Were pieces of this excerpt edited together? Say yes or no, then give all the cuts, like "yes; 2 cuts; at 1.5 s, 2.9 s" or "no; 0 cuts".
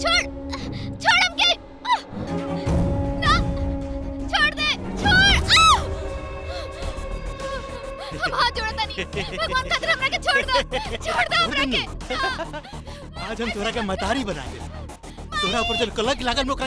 yes; 2 cuts; at 2.3 s, 4.8 s